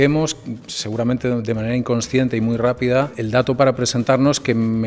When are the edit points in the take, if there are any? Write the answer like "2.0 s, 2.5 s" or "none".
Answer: none